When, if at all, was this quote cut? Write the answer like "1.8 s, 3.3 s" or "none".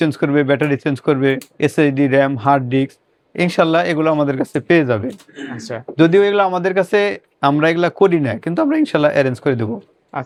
none